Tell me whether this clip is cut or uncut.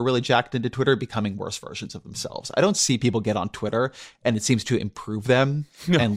uncut